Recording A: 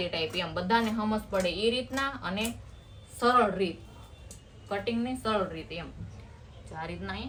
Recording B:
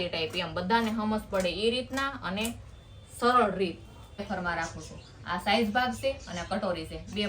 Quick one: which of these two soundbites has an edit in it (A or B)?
B